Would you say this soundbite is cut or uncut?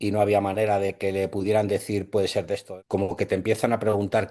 cut